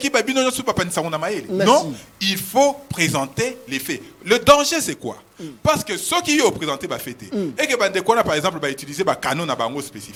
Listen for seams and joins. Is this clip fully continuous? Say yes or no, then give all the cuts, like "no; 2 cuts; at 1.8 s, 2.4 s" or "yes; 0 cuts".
yes; 0 cuts